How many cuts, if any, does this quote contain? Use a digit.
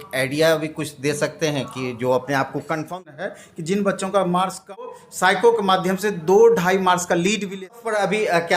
3